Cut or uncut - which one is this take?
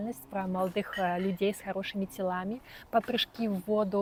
uncut